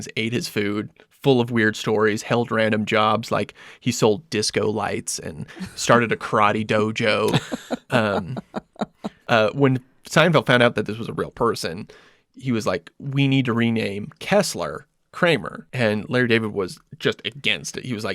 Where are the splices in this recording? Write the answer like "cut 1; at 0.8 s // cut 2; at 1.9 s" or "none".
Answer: cut 1; at 9.1 s // cut 2; at 15.6 s